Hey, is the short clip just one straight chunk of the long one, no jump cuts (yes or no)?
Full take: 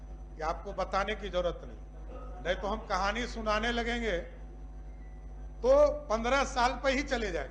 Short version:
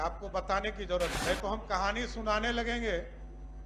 no